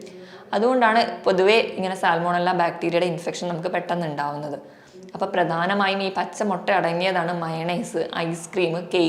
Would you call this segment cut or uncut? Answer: uncut